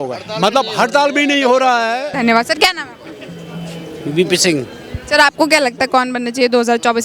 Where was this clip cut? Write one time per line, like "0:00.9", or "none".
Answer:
0:02.1